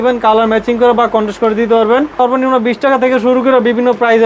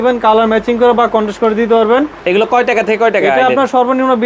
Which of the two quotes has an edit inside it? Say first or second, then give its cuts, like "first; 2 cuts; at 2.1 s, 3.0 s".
first; 1 cut; at 2.1 s